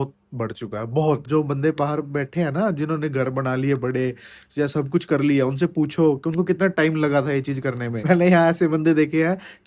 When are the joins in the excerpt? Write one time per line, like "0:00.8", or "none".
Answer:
0:01.3
0:08.0